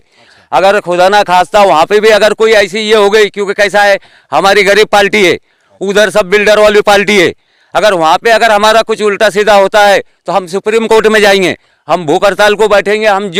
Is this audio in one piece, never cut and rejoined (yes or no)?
yes